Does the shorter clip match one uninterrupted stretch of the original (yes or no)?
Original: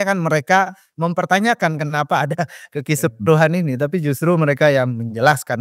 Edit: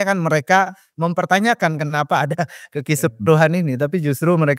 yes